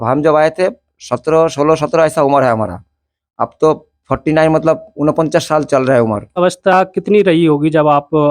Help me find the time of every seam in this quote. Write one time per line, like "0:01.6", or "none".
0:06.4